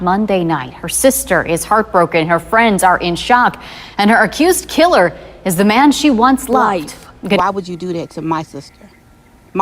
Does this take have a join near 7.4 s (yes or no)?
yes